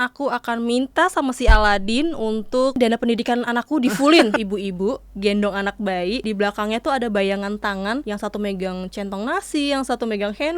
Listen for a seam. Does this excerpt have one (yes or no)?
yes